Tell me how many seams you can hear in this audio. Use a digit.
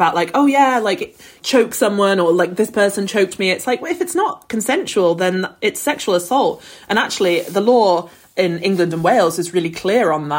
1